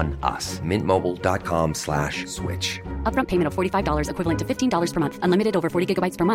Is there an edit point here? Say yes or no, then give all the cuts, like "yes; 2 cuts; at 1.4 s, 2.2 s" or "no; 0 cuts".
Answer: no; 0 cuts